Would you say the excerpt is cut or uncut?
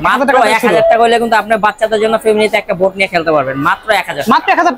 uncut